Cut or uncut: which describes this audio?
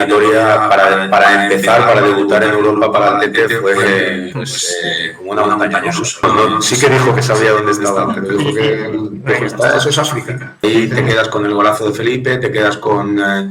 cut